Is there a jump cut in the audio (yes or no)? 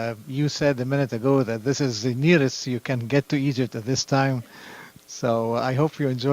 yes